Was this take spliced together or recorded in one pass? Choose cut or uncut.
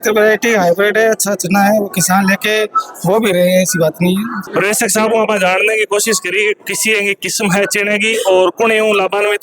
uncut